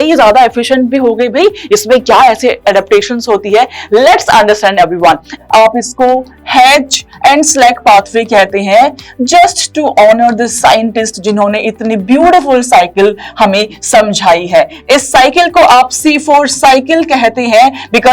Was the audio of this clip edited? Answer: yes; 1 cut; at 5.3 s

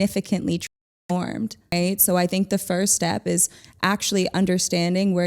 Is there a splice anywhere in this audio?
yes; 1 cut; at 2.1 s

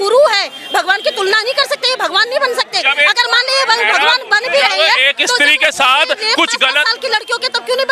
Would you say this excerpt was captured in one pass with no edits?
yes; 0 cuts

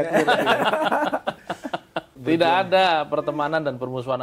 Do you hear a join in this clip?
yes; 1 cut; at 2.1 s

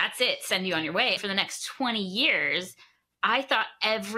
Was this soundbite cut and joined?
yes; 1 cut; at 1.2 s

